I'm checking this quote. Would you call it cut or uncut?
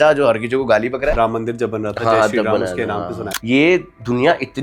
cut